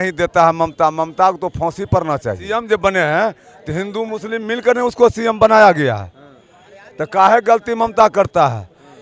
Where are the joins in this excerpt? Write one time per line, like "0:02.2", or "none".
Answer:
0:02.5